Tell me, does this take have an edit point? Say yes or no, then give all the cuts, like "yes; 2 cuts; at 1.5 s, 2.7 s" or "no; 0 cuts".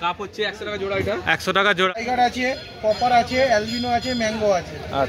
yes; 1 cut; at 2.0 s